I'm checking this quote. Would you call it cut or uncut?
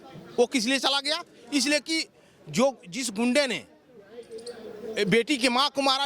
uncut